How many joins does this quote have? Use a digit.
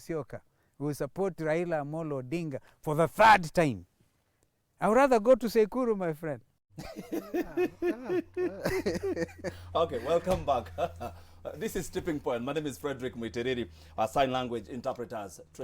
0